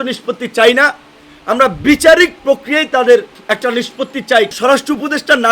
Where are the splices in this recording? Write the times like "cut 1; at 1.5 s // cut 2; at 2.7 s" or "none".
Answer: cut 1; at 3.3 s // cut 2; at 4.5 s

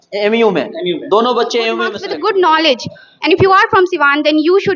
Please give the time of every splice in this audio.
cut 1; at 2.0 s

